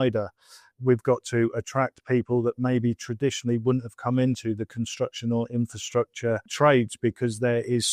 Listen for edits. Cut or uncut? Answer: cut